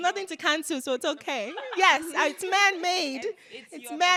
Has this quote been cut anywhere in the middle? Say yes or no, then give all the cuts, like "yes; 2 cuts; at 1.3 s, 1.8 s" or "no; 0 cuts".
no; 0 cuts